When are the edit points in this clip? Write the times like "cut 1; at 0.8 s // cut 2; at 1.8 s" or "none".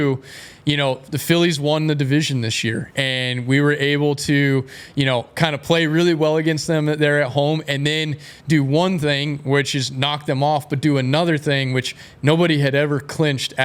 none